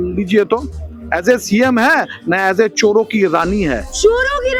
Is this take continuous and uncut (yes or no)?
yes